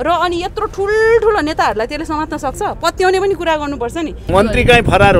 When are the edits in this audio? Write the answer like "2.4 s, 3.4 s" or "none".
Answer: 4.3 s